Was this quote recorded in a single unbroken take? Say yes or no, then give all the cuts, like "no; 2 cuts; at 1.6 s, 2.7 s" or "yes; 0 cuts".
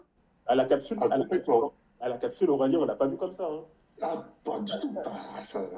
yes; 0 cuts